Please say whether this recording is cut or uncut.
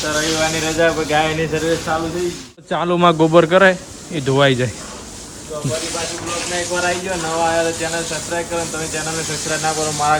cut